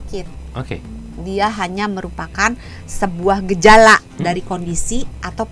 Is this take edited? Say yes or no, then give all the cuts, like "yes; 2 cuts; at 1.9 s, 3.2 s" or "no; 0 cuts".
no; 0 cuts